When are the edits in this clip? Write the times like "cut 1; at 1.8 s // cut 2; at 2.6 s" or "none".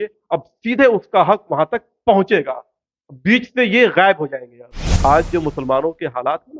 cut 1; at 5.0 s